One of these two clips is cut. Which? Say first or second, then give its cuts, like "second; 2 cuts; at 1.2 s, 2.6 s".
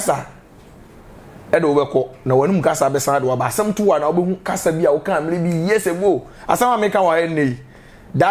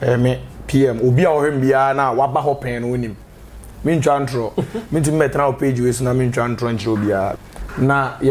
second; 1 cut; at 7.4 s